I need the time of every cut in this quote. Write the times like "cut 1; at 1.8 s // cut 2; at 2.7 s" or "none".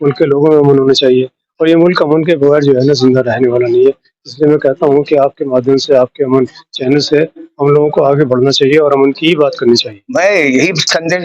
cut 1; at 10.0 s